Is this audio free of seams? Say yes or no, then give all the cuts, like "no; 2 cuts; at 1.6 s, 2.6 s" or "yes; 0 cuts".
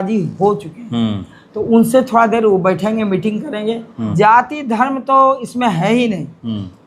no; 1 cut; at 4.1 s